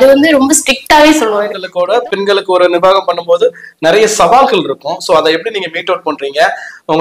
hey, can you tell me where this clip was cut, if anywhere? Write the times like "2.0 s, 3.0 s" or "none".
2.0 s